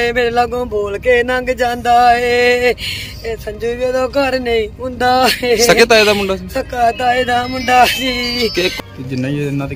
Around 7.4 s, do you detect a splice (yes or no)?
no